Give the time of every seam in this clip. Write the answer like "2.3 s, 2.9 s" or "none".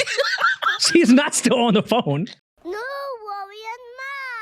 2.4 s